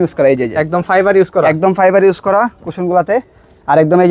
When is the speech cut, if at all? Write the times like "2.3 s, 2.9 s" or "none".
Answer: none